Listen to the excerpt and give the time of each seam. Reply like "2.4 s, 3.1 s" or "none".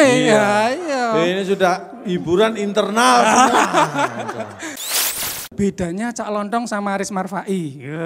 5.0 s